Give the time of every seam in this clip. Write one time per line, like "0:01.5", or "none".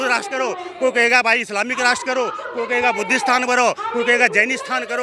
none